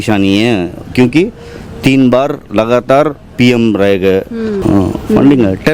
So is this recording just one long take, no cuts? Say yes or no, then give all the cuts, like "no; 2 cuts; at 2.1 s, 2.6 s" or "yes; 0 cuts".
no; 1 cut; at 4.6 s